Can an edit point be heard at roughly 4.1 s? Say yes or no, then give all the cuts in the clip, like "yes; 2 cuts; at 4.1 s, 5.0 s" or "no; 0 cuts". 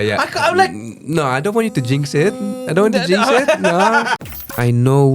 yes; 1 cut; at 4.1 s